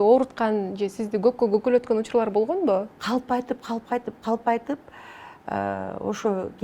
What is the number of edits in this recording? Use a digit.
1